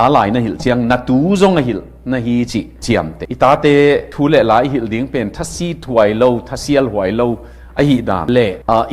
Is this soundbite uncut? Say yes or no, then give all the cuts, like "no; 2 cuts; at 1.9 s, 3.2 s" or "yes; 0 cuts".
no; 1 cut; at 3.2 s